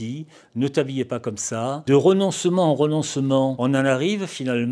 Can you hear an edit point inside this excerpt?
yes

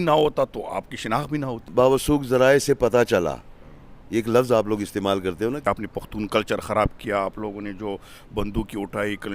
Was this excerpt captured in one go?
no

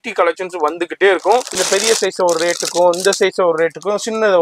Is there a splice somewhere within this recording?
yes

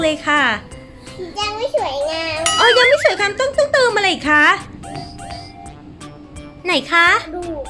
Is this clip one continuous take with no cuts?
yes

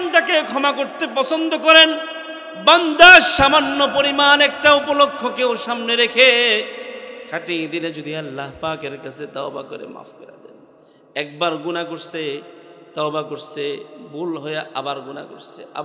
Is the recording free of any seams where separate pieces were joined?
yes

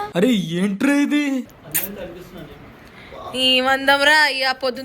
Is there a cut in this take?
yes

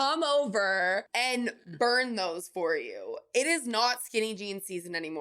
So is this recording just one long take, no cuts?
no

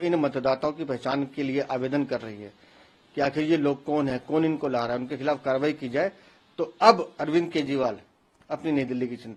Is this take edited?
no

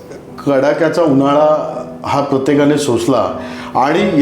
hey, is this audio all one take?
yes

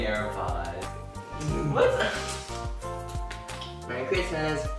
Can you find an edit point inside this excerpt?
yes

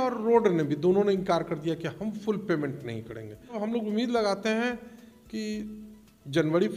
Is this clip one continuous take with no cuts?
no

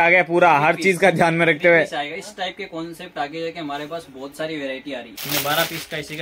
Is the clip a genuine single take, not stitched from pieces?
no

